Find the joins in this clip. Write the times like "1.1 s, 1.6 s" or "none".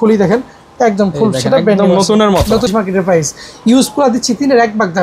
2.7 s

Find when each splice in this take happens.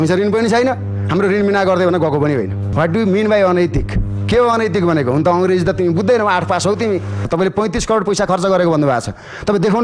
2.6 s, 7.2 s

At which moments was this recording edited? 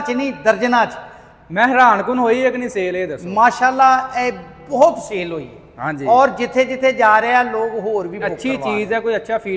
none

